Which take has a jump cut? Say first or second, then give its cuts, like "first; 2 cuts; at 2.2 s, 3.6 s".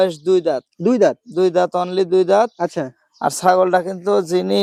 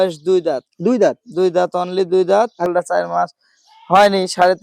second; 1 cut; at 2.7 s